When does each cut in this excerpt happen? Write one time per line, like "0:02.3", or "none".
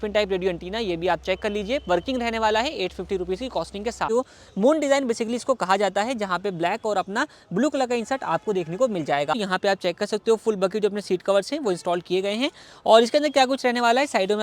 0:04.1
0:09.4